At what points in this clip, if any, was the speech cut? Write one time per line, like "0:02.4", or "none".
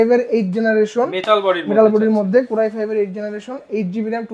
none